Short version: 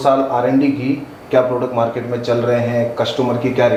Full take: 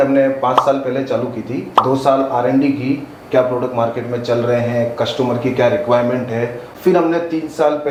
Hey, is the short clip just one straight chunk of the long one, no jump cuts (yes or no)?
yes